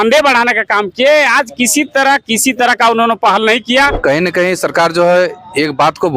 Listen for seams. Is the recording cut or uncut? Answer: cut